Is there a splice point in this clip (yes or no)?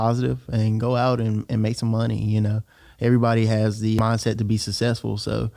yes